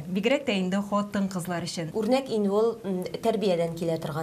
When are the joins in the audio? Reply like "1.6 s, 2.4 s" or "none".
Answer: 1.8 s